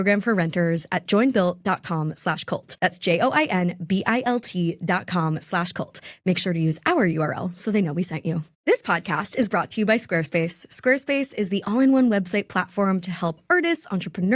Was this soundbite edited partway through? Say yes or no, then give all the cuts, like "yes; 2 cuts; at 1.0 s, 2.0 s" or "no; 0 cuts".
no; 0 cuts